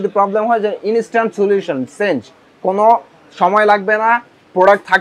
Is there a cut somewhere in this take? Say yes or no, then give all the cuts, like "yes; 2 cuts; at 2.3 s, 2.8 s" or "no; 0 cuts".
no; 0 cuts